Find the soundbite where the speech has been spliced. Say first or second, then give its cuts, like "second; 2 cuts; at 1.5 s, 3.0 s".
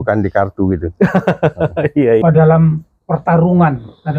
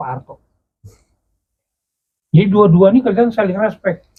first; 1 cut; at 2.2 s